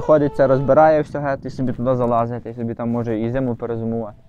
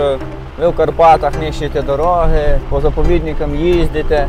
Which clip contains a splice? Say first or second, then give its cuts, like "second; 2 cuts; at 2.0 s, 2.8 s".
second; 1 cut; at 2.6 s